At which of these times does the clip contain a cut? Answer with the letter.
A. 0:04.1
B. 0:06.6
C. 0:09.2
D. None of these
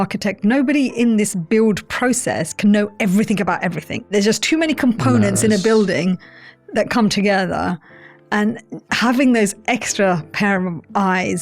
A